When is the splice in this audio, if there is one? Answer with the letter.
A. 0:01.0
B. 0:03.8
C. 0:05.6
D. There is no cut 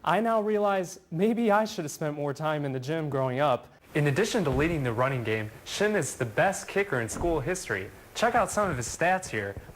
B